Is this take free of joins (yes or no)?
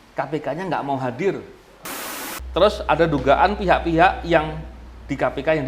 no